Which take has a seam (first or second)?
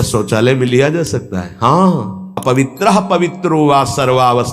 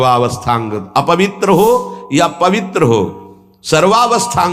first